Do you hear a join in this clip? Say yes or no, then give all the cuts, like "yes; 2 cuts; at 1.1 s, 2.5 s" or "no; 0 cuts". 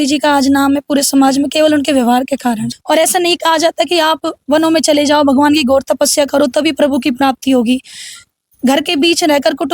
yes; 1 cut; at 2.6 s